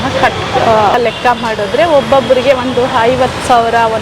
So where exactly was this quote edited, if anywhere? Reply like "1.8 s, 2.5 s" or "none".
1.0 s